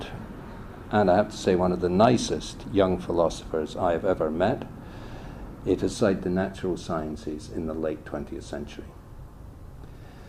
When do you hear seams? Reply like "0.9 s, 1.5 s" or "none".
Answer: none